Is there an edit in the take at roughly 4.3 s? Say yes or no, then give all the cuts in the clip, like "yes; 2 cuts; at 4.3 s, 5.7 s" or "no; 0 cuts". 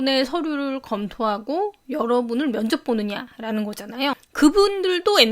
yes; 1 cut; at 4.3 s